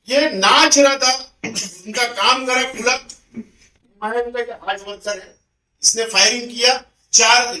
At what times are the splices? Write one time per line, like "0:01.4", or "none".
none